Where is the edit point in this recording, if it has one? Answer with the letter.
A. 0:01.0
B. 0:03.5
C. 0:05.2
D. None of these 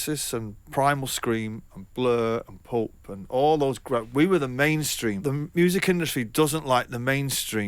C